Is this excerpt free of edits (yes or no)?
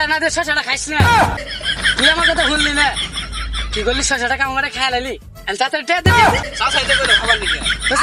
yes